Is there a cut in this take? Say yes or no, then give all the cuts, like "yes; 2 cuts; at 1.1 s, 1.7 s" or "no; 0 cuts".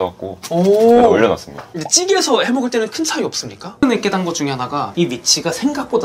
yes; 1 cut; at 3.8 s